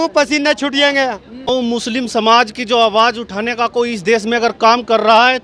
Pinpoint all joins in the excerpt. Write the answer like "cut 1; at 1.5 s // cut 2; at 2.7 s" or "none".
cut 1; at 1.5 s